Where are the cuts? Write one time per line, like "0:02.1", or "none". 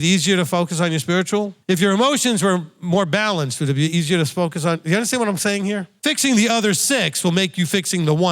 0:01.6
0:05.9